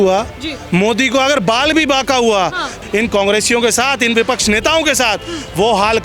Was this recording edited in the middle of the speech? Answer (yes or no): yes